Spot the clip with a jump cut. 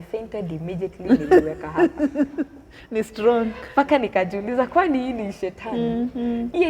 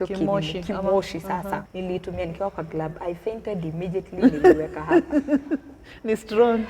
second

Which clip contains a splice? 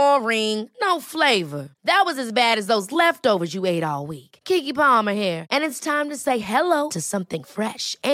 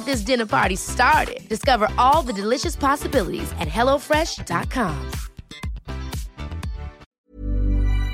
second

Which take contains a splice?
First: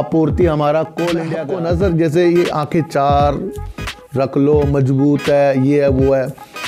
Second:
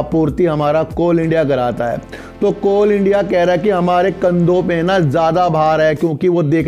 first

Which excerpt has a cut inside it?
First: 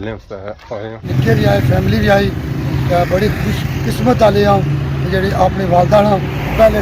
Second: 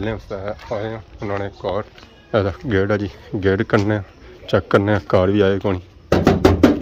first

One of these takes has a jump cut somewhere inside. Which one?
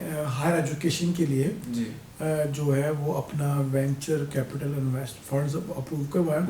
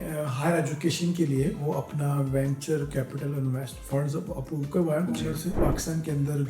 second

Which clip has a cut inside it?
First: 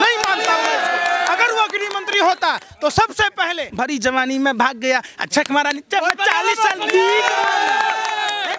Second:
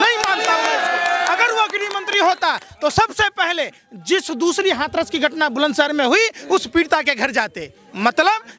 first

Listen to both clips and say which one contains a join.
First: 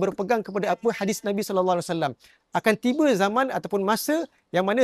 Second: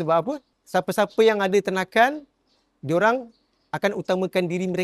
first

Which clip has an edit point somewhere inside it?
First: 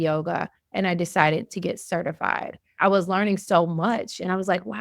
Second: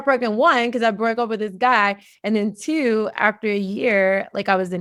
first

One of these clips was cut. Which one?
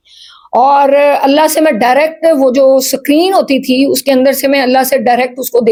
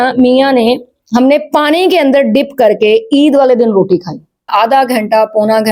second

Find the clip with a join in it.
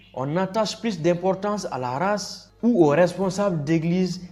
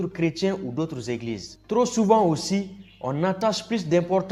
second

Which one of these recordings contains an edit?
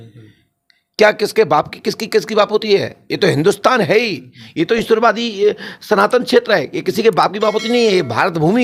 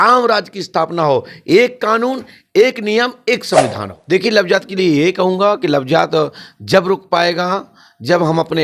second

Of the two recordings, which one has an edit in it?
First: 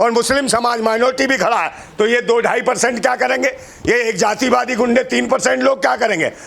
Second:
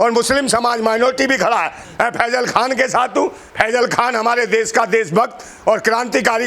second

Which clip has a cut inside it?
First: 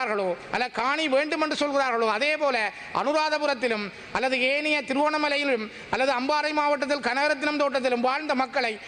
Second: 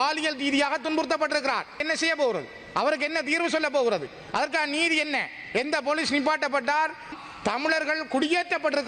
second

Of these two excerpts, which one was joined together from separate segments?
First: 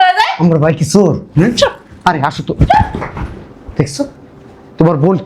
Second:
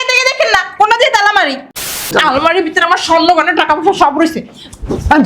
second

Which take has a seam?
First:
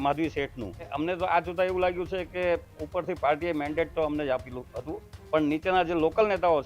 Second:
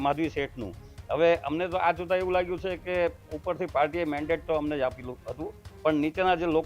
first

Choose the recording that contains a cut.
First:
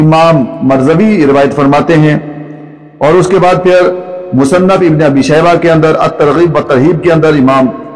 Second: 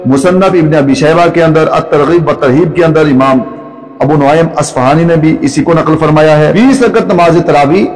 second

